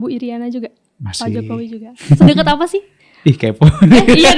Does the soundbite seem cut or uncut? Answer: uncut